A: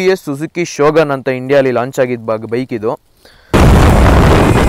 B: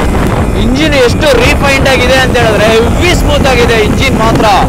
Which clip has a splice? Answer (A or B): A